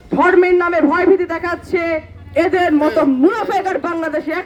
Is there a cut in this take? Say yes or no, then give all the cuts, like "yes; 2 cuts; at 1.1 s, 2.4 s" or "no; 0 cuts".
no; 0 cuts